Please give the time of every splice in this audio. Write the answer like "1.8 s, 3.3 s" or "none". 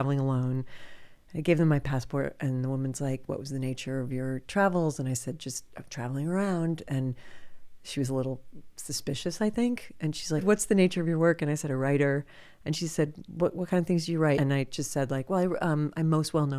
10.4 s, 14.4 s